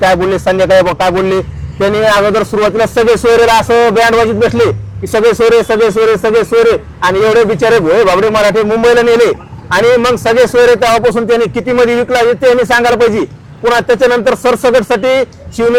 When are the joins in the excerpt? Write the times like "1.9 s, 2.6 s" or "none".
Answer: none

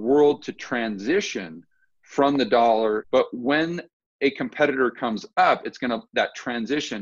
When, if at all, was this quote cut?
3.0 s

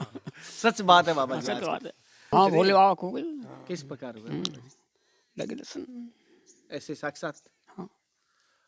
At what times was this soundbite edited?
2.3 s

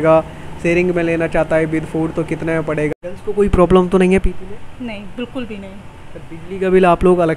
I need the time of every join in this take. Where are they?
3.1 s

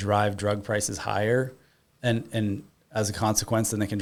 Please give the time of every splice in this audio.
none

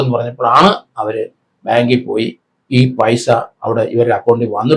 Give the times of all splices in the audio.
none

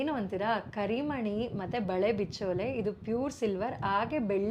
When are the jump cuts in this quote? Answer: none

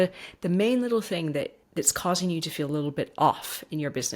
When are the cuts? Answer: 1.6 s

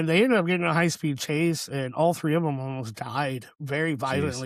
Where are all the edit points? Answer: none

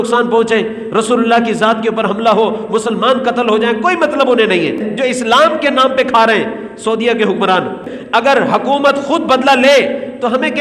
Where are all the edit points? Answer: 4.9 s, 7.9 s

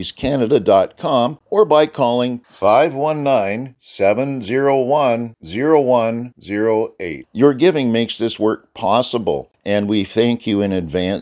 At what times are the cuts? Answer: 1.4 s, 9.5 s

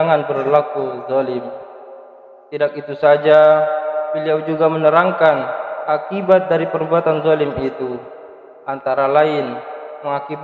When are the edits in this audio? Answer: none

